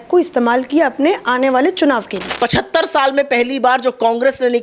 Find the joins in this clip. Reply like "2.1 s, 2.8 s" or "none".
2.2 s